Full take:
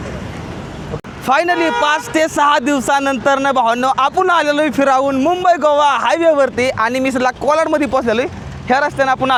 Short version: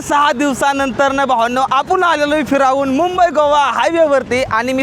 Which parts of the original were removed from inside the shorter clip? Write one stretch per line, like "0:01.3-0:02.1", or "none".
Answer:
none

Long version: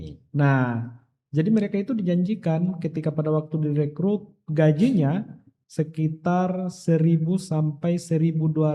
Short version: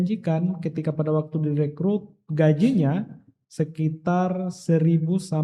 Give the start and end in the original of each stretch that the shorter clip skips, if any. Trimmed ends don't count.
none

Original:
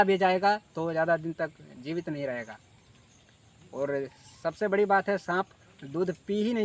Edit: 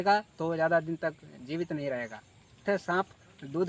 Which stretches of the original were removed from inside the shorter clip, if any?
0:03.0-0:05.0

